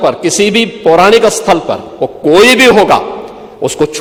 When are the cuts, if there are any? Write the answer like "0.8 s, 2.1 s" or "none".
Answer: none